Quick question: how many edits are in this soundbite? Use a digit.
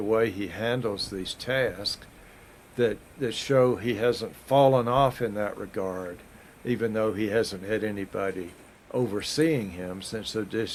0